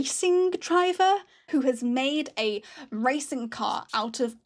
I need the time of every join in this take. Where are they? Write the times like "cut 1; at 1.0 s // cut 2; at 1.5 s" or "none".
cut 1; at 1.5 s